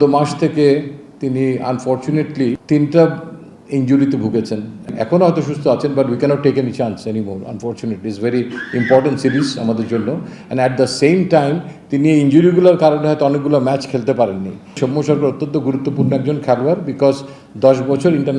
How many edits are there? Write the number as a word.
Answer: three